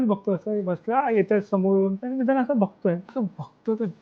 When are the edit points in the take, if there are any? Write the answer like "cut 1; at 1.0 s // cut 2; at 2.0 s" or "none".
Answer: cut 1; at 2.0 s // cut 2; at 3.1 s